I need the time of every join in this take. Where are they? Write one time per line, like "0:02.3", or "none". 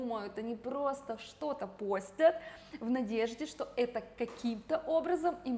none